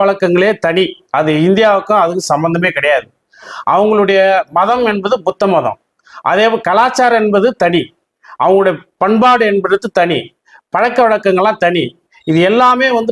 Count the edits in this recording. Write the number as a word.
zero